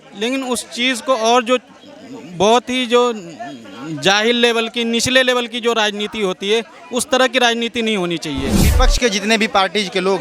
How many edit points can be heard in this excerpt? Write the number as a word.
one